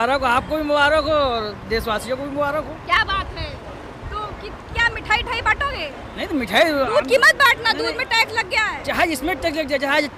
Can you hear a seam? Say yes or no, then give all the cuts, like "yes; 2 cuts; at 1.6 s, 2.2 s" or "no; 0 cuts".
no; 0 cuts